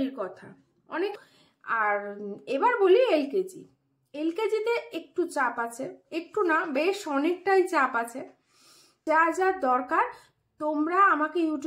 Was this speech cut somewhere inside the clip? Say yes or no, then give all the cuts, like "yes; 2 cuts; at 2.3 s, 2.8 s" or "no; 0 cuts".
yes; 2 cuts; at 1.1 s, 9.0 s